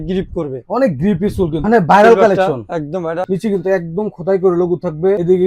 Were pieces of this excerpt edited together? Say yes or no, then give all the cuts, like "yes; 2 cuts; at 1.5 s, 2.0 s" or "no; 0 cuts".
yes; 2 cuts; at 1.6 s, 3.3 s